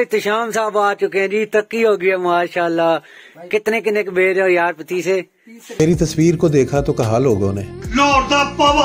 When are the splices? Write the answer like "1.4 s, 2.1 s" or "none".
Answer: 1.6 s, 5.8 s